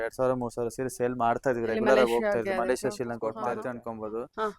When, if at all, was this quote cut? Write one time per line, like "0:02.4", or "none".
0:03.5